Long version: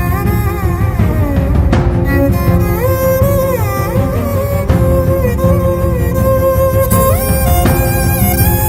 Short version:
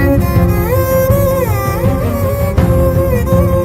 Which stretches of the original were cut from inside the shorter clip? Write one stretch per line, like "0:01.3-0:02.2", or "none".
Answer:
none